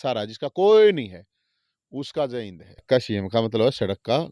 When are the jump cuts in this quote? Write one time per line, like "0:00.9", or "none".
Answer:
0:02.8